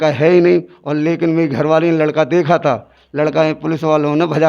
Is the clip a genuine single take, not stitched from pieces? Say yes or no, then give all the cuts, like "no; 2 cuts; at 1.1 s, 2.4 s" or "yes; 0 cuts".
yes; 0 cuts